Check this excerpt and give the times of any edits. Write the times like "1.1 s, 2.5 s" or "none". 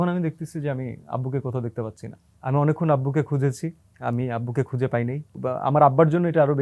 2.3 s, 3.9 s, 5.4 s